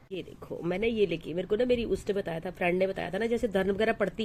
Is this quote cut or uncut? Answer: uncut